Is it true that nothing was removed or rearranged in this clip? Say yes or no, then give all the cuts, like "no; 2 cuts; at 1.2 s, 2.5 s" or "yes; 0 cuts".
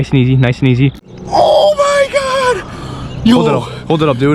no; 1 cut; at 1.1 s